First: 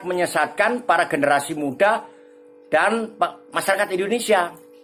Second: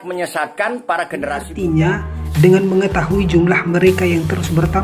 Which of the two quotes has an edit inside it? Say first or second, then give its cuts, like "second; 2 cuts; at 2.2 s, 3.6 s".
second; 1 cut; at 1.5 s